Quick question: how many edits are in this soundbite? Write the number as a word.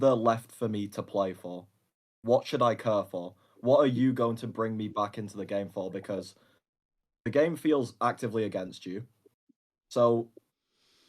zero